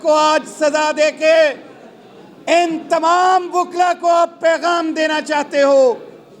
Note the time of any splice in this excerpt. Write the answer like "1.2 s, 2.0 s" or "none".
none